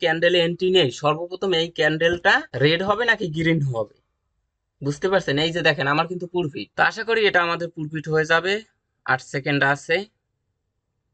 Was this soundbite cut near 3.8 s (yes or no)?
no